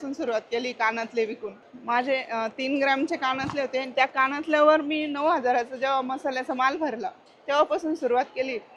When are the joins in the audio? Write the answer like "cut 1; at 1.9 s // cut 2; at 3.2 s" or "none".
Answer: none

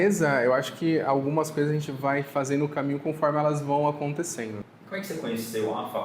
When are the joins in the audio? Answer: cut 1; at 4.6 s

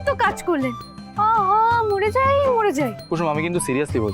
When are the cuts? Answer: cut 1; at 3.0 s

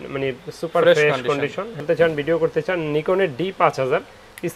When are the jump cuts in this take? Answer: cut 1; at 1.8 s

